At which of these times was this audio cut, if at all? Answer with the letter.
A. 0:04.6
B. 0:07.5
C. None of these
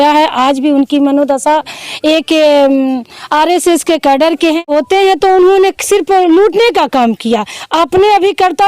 A